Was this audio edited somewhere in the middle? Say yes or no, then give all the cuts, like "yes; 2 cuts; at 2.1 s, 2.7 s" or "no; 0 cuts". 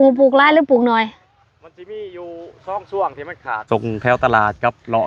yes; 1 cut; at 3.6 s